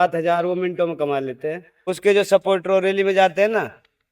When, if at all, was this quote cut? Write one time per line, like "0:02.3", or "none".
0:01.7